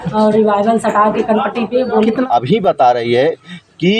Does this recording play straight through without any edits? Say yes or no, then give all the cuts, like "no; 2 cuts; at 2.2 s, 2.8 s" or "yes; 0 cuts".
no; 1 cut; at 2.3 s